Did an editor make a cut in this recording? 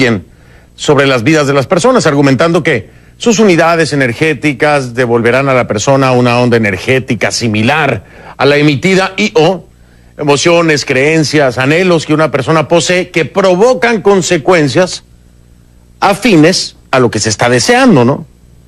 yes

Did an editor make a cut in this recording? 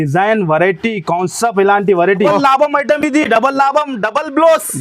yes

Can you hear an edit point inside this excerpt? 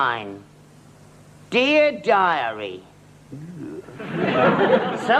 no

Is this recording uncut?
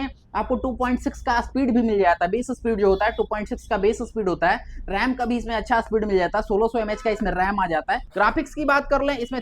no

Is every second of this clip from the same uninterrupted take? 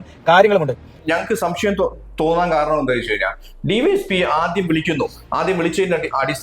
no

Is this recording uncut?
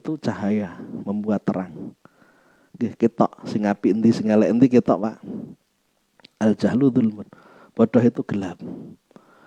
yes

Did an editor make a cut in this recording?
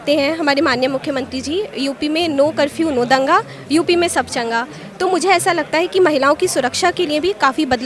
no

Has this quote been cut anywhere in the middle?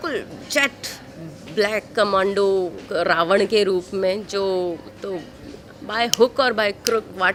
no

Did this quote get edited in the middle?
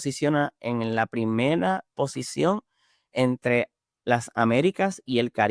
no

